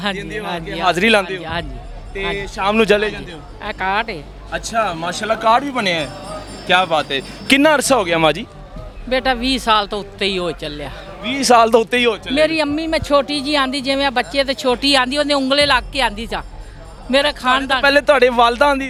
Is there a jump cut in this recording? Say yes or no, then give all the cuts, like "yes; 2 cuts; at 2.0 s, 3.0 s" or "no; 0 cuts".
no; 0 cuts